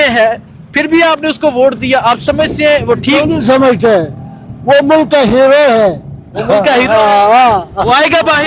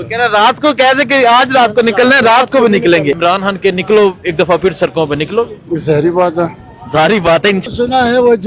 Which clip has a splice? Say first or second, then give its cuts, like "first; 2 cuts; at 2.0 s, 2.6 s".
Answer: second; 2 cuts; at 3.2 s, 7.6 s